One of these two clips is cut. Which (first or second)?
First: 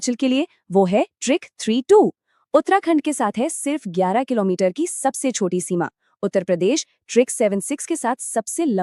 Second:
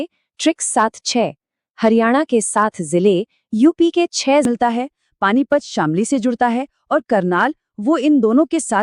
second